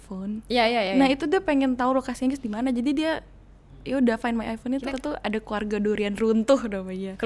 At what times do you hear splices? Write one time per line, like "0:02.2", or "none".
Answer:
0:04.9